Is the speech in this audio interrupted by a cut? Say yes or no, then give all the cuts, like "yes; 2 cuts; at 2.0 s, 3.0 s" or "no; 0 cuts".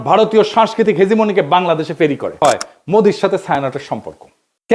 yes; 1 cut; at 2.3 s